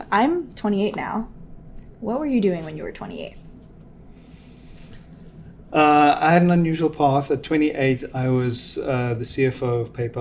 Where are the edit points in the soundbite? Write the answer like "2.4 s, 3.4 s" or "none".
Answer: none